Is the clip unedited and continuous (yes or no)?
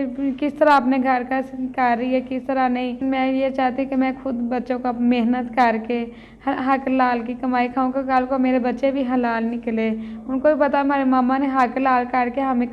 no